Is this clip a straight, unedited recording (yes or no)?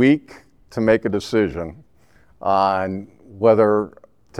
yes